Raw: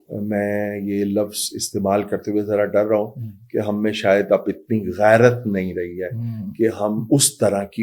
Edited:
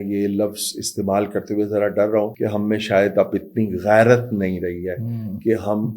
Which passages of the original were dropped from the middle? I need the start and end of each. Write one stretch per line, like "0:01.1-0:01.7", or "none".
0:03.1-0:03.5